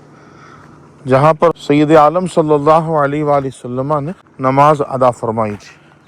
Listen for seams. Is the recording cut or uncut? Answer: cut